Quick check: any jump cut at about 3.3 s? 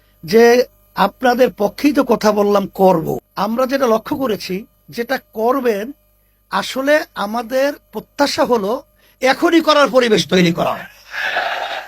yes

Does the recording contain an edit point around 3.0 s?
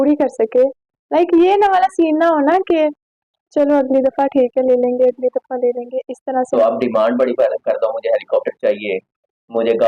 no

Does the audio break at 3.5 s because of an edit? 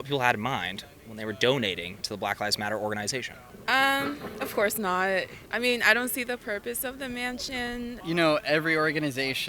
yes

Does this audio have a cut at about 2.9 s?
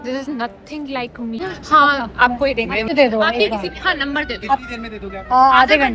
yes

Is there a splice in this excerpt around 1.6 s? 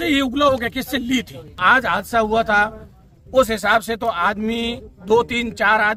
yes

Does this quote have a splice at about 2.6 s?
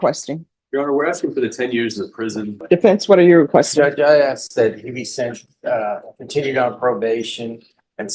yes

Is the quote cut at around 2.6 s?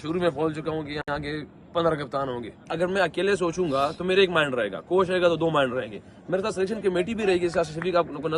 yes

